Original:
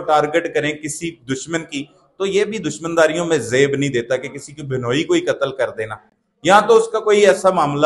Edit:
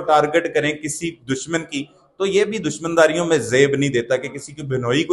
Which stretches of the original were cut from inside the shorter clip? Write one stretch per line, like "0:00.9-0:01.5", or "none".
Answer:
none